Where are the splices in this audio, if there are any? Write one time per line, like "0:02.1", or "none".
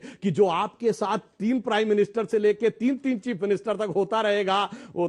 none